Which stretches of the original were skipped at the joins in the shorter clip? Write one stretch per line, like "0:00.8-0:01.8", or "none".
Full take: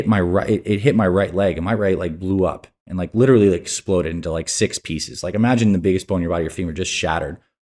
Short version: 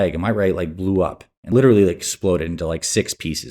0:02.7-0:03.0